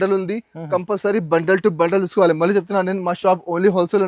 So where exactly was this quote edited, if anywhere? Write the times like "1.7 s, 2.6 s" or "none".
none